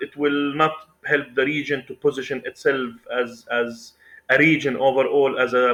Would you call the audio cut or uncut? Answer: uncut